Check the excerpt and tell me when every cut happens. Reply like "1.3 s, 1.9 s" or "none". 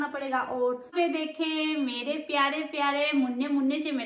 0.9 s